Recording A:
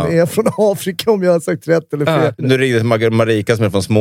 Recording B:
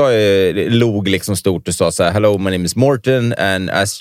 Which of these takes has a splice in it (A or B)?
A